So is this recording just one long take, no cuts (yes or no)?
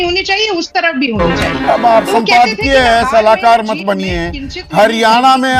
yes